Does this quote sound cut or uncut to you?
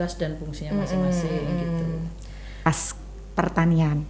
cut